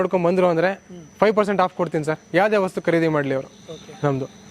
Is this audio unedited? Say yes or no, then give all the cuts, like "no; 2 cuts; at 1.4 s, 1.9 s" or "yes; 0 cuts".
yes; 0 cuts